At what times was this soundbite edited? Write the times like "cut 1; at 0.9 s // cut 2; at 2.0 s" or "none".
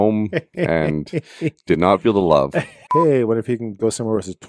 cut 1; at 2.8 s